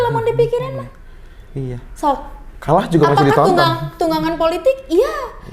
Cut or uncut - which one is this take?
uncut